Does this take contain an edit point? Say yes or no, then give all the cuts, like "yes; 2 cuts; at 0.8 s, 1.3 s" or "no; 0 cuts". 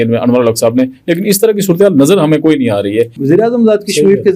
yes; 1 cut; at 3.1 s